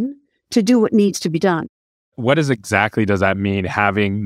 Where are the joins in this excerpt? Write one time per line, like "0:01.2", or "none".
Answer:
0:01.6

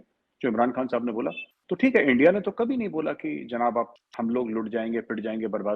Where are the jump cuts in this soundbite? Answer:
0:01.5
0:04.0

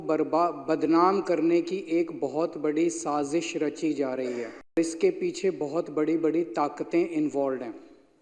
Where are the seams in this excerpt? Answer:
0:04.8

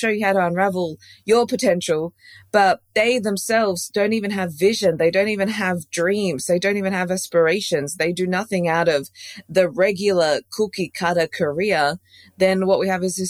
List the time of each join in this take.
0:02.9

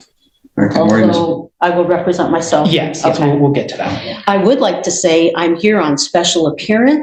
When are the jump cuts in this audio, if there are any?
none

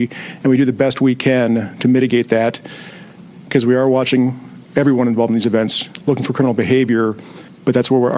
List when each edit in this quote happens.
none

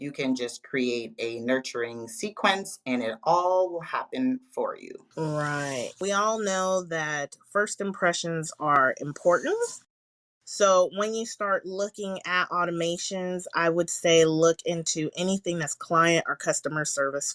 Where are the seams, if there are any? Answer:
0:05.0
0:05.9

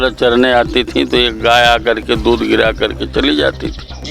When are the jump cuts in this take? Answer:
none

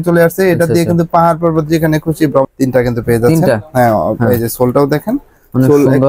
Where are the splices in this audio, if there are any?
0:02.5

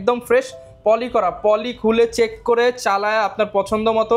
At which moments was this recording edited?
none

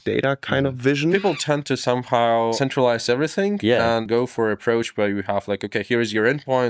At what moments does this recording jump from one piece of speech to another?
0:01.1
0:02.6
0:04.1

